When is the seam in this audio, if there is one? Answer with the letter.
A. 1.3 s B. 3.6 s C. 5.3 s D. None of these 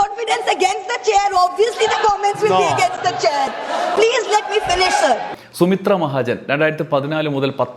D